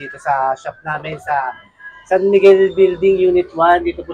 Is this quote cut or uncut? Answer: uncut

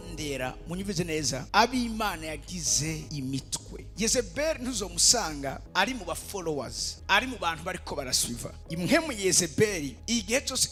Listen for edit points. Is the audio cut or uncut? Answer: uncut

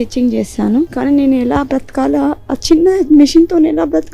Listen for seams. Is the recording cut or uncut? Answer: cut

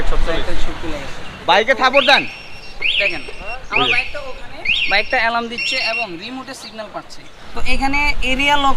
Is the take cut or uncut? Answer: cut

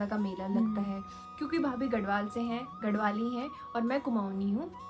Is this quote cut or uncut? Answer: cut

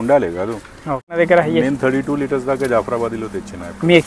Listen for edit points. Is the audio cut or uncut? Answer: cut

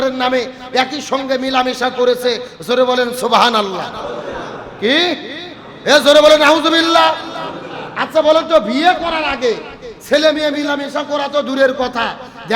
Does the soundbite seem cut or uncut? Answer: uncut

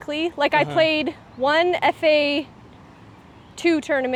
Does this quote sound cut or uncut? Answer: uncut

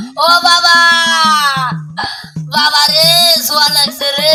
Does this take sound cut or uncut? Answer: uncut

